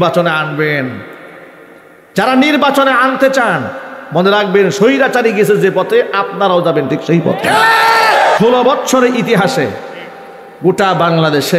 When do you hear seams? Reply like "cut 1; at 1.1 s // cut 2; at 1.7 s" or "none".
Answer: cut 1; at 8.4 s